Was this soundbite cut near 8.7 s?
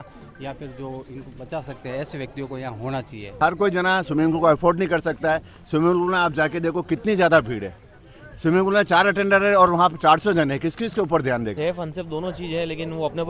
no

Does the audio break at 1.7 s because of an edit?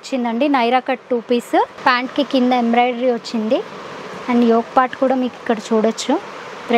yes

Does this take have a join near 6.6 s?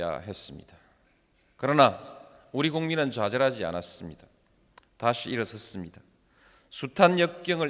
yes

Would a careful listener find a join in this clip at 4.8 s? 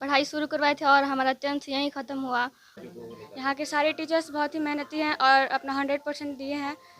no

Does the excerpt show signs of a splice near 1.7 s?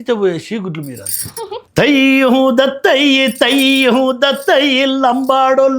yes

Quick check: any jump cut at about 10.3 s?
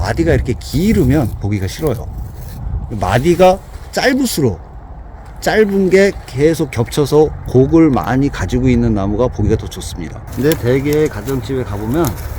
yes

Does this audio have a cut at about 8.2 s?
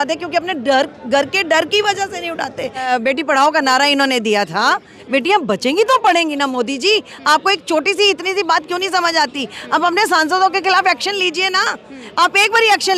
no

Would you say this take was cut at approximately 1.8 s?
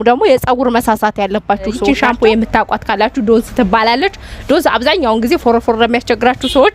yes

